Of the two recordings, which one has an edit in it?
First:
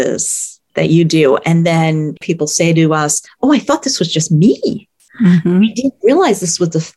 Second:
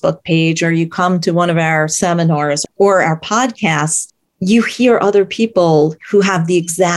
first; 2 cuts; at 2.2 s, 3.2 s

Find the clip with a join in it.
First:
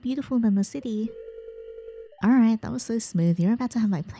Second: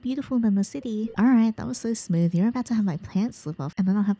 second; 1 cut; at 1.1 s

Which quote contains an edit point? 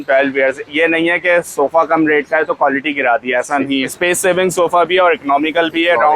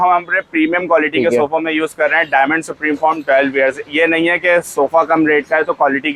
first; 1 cut; at 4.0 s

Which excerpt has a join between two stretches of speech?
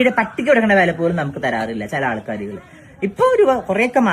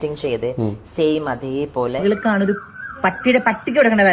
second; 1 cut; at 2.0 s

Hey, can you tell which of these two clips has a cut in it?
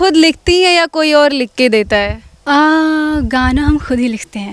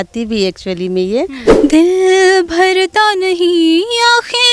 second; 1 cut; at 1.4 s

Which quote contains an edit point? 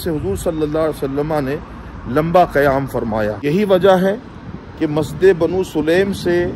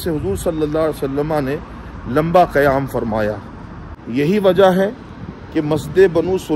first; 1 cut; at 3.4 s

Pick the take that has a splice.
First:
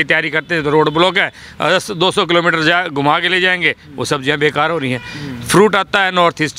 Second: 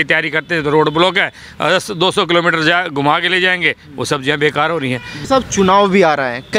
second; 1 cut; at 5.2 s

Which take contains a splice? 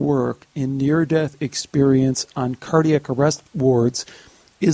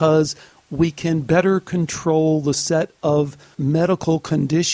second; 1 cut; at 3.5 s

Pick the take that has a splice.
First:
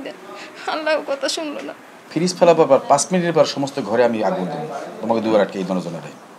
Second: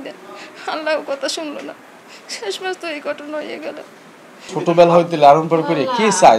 first; 1 cut; at 2.0 s

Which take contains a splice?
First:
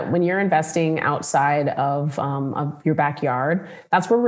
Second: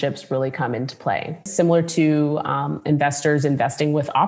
second; 1 cut; at 1.5 s

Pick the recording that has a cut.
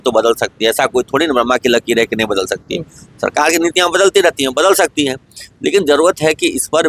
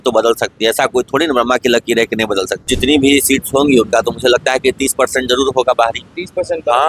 second; 1 cut; at 2.7 s

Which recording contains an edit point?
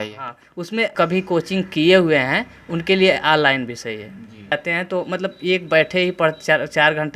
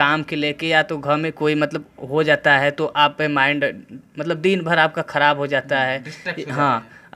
first; 2 cuts; at 0.9 s, 4.5 s

